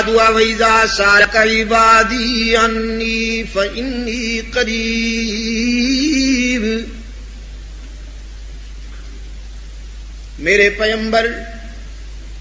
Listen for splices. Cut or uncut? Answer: cut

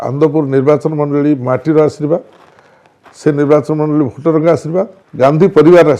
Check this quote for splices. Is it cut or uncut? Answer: cut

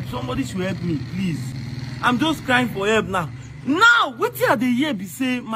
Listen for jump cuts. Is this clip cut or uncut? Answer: cut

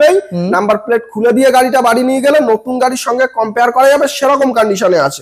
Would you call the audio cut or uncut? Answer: uncut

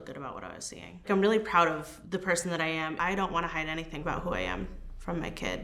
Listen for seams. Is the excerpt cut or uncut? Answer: cut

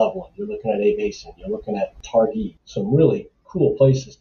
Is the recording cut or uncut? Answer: cut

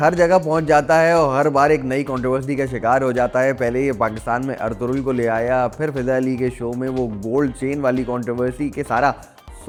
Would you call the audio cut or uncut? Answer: uncut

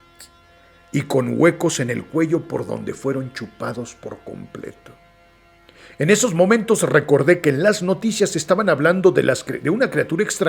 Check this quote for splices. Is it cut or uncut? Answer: uncut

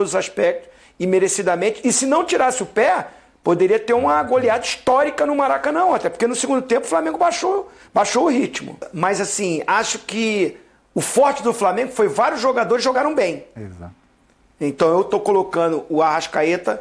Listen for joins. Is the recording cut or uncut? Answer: cut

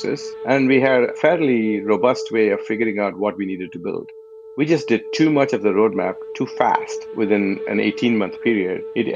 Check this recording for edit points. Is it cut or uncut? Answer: cut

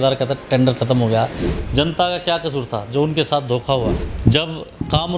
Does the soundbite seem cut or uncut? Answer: cut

